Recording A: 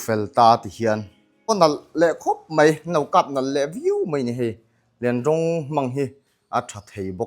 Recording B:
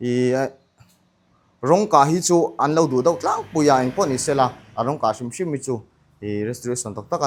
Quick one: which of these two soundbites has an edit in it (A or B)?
A